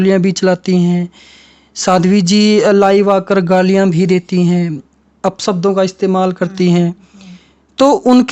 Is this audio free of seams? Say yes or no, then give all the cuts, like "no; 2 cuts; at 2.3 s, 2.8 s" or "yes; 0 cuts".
yes; 0 cuts